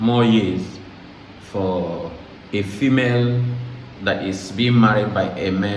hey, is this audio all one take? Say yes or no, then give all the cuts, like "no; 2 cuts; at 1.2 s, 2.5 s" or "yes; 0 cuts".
yes; 0 cuts